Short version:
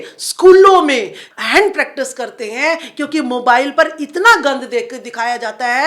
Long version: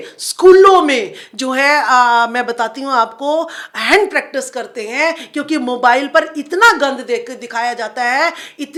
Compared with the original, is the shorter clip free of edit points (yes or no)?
no